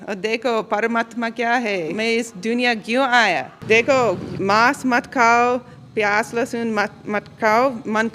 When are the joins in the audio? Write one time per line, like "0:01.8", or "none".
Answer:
0:01.9
0:03.5
0:04.3

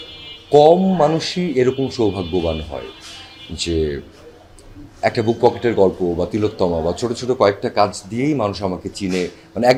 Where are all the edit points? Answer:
none

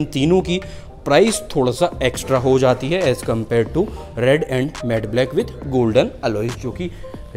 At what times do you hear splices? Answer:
none

